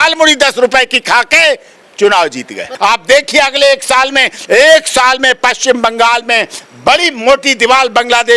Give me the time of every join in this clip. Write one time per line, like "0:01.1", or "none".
0:02.7